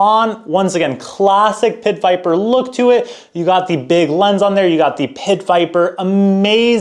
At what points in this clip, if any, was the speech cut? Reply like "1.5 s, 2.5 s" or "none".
none